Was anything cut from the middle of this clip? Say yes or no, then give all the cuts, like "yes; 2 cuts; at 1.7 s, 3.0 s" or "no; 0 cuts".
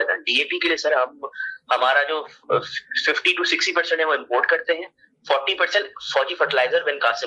no; 0 cuts